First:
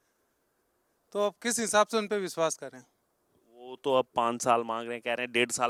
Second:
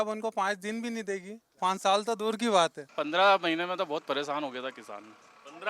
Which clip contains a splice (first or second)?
second